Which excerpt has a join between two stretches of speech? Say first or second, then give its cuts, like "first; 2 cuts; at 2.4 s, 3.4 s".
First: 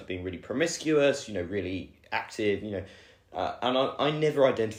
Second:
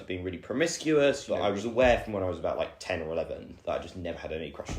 second; 1 cut; at 1.3 s